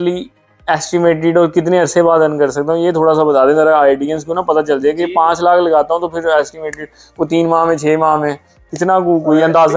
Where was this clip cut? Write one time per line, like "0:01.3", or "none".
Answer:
none